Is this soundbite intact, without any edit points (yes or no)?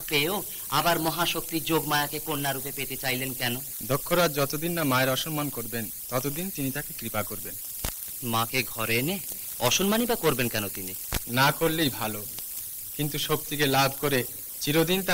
no